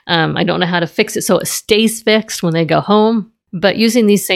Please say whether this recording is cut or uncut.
cut